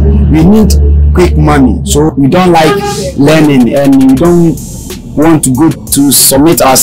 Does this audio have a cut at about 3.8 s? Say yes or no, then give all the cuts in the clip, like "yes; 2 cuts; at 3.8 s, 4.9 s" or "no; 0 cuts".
no; 2 cuts; at 2.1 s, 5.8 s